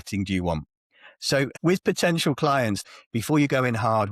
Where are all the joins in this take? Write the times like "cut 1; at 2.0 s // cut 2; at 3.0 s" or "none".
cut 1; at 1.5 s // cut 2; at 2.8 s